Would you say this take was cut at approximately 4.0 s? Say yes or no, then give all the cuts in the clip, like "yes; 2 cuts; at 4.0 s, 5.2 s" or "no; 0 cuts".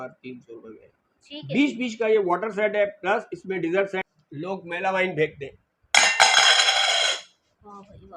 yes; 1 cut; at 4.0 s